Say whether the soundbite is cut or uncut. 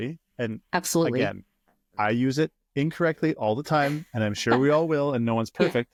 uncut